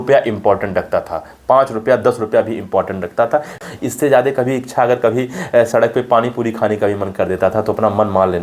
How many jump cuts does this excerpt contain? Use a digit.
1